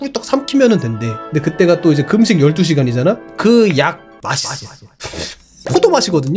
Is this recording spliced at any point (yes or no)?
no